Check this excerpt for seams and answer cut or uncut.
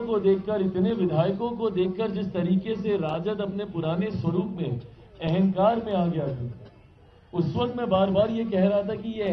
uncut